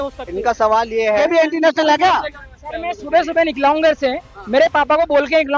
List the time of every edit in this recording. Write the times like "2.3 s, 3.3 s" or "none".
1.2 s